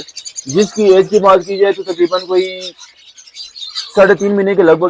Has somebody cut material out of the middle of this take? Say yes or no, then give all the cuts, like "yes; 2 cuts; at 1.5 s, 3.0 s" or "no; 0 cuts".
no; 0 cuts